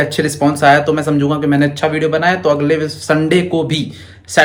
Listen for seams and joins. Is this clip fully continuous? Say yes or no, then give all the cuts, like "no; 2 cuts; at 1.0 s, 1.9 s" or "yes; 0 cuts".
yes; 0 cuts